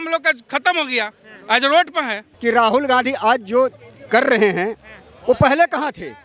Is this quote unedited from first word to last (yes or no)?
no